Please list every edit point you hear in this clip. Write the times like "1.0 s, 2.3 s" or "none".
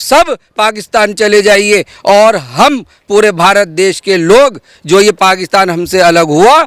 none

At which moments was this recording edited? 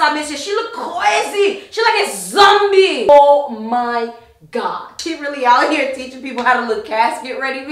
3.1 s, 5.1 s

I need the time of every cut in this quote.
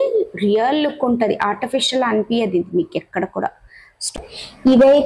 4.1 s

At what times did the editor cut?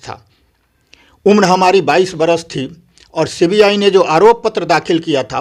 none

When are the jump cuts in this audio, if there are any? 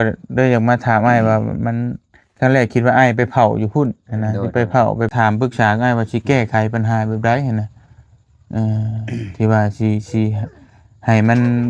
5.1 s

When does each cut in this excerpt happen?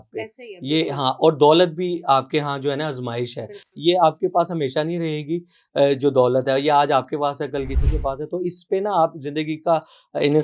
none

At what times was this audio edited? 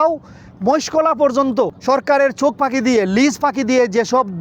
1.8 s

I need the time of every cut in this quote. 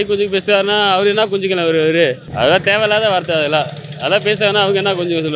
2.2 s

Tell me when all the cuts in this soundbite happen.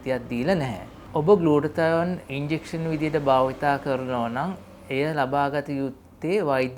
none

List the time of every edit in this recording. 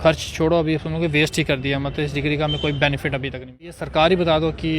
3.8 s

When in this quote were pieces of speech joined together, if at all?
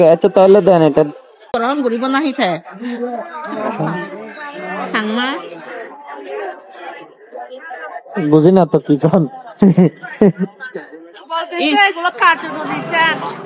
1.5 s

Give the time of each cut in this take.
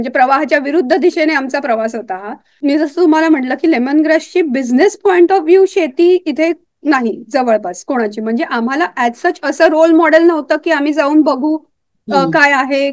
2.5 s

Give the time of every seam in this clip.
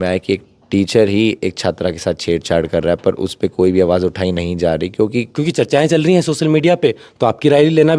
5.3 s

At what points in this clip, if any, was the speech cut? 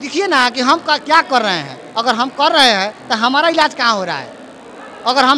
none

